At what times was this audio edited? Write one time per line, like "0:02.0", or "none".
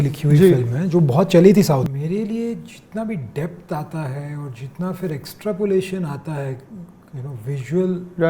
0:01.8